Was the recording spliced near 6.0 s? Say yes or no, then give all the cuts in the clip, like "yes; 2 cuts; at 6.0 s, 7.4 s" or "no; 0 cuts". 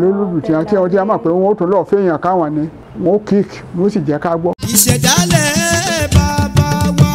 no; 2 cuts; at 2.9 s, 4.6 s